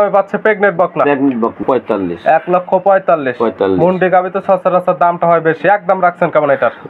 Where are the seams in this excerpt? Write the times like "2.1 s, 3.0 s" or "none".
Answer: 1.6 s